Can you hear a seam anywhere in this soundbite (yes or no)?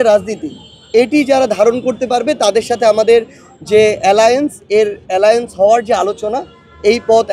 no